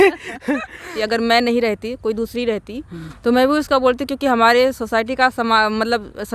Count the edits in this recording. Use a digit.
1